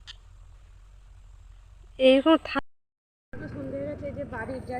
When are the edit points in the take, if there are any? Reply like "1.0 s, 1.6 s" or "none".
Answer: 2.5 s